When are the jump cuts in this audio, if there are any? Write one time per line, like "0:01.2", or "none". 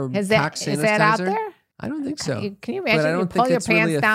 0:01.7